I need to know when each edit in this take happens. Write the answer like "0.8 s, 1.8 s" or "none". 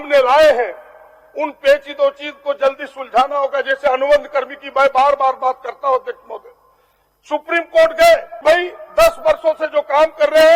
8.3 s